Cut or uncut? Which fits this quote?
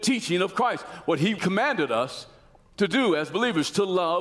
cut